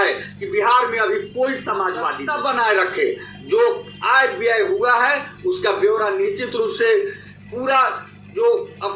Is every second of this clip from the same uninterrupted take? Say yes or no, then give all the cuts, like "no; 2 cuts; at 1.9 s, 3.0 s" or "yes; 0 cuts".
no; 1 cut; at 2.2 s